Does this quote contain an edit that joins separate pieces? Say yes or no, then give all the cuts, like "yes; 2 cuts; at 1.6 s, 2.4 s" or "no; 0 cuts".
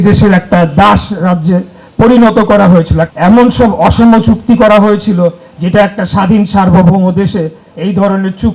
yes; 1 cut; at 3.0 s